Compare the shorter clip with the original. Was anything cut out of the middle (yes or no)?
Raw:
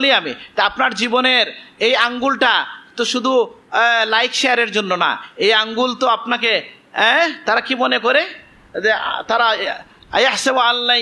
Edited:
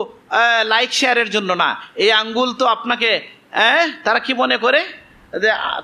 no